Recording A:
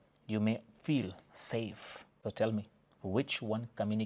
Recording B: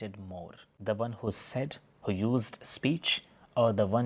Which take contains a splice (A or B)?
A